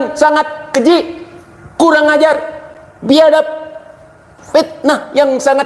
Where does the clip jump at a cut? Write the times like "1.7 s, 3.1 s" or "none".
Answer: none